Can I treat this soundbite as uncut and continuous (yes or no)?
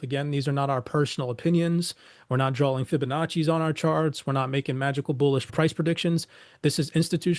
no